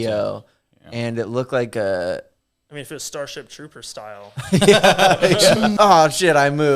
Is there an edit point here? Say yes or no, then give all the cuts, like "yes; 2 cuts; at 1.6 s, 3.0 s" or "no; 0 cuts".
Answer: yes; 1 cut; at 5.7 s